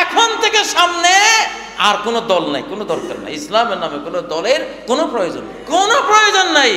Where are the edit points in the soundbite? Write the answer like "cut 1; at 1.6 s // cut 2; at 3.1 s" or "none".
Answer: cut 1; at 5.5 s